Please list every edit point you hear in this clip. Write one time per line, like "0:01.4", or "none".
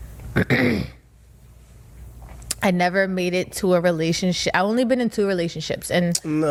none